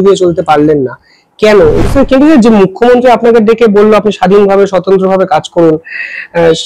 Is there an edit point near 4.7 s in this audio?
no; 1 cut; at 1.8 s

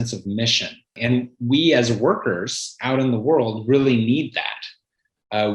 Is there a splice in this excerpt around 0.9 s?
yes; 1 cut; at 0.9 s

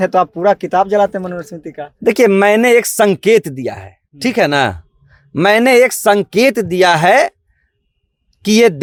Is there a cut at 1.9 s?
no; 0 cuts

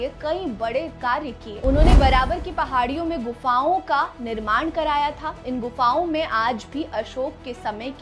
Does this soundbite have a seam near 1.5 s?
yes; 1 cut; at 1.5 s

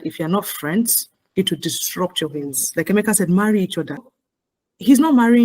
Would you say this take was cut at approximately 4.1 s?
yes; 2 cuts; at 2.6 s, 4.1 s

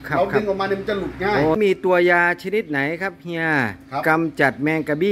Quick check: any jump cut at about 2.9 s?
no; 1 cut; at 1.5 s

